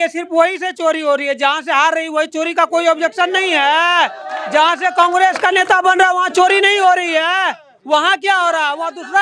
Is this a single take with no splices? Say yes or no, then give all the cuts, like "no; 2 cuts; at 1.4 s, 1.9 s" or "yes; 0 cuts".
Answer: yes; 0 cuts